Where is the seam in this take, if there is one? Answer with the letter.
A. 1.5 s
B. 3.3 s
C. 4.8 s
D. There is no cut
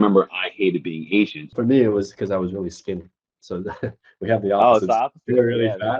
A